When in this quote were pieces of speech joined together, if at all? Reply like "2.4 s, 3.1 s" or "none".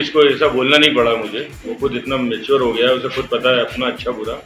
none